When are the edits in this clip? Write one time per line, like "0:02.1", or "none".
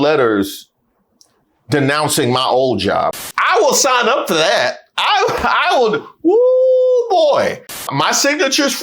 0:03.2
0:07.9